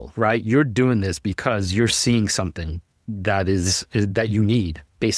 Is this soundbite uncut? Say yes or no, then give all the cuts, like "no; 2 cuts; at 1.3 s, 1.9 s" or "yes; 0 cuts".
no; 1 cut; at 3.1 s